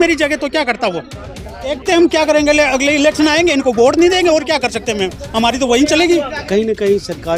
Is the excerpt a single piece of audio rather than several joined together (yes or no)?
no